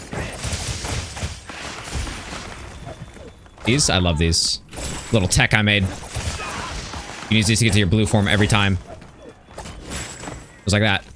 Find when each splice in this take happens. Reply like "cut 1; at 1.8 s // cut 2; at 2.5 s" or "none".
none